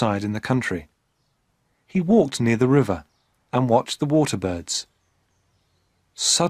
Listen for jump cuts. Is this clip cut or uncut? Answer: cut